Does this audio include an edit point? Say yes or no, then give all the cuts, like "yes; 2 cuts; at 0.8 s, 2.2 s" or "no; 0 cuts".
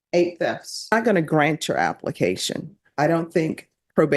yes; 1 cut; at 0.9 s